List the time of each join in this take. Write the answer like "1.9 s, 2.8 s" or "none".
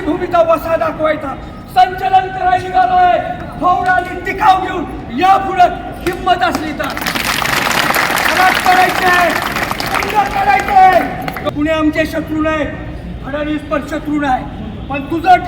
11.4 s